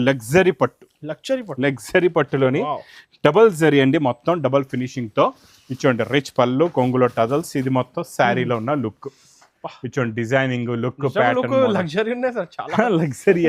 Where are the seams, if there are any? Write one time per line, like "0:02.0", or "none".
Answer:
none